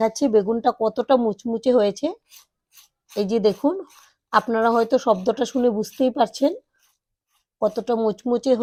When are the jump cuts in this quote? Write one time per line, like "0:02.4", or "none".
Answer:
none

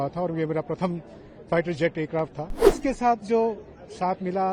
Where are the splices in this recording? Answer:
0:02.8

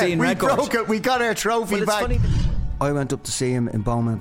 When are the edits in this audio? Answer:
0:02.4

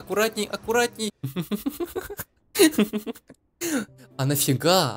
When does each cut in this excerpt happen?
0:01.2

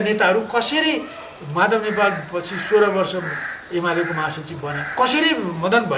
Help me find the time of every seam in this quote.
0:04.8

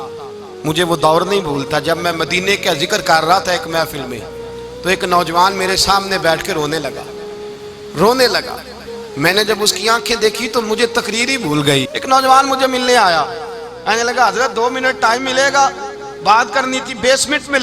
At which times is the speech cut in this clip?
0:11.9

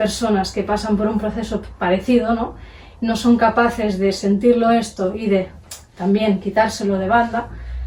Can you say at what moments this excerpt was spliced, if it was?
none

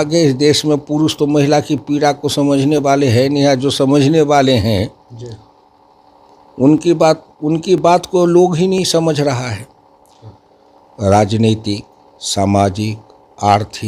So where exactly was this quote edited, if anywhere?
0:10.6

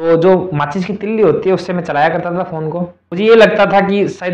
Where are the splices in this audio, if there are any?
0:03.0

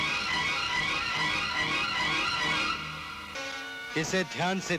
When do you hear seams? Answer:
0:03.4

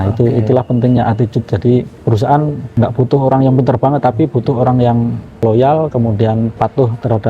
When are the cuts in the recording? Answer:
0:01.9
0:02.6
0:05.4
0:06.5

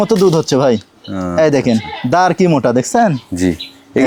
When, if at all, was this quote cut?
none

